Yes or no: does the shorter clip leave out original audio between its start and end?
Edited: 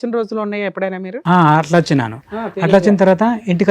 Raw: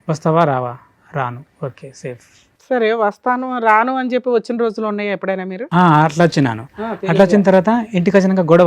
no